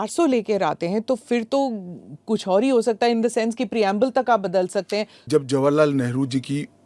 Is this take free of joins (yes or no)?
no